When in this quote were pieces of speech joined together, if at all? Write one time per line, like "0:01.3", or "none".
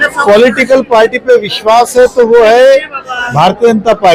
none